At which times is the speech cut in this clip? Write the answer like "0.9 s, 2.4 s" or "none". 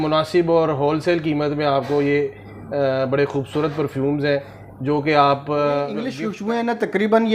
6.2 s